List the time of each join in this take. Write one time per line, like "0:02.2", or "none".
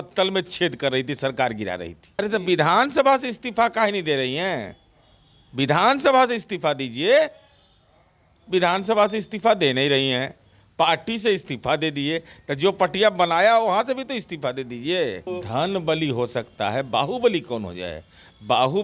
0:02.1
0:15.2